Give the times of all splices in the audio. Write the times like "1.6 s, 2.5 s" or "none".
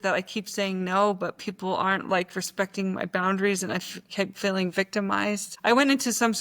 5.5 s